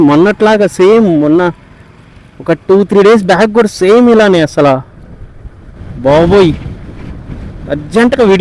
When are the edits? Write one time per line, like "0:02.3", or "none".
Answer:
none